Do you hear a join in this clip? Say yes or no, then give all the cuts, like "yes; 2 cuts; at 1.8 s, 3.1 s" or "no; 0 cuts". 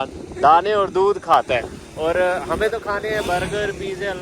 no; 0 cuts